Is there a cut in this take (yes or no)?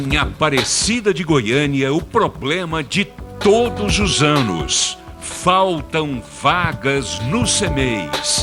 no